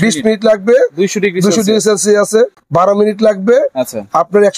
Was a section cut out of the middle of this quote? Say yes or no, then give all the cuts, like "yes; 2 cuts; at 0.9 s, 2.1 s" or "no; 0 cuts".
yes; 1 cut; at 2.6 s